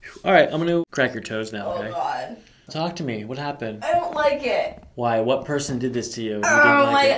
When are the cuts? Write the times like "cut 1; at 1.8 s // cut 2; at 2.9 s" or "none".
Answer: cut 1; at 0.8 s // cut 2; at 2.7 s